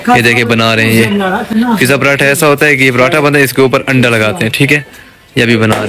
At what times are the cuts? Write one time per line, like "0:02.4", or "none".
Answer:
none